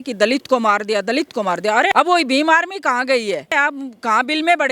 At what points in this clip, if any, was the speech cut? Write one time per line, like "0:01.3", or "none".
0:01.9
0:03.5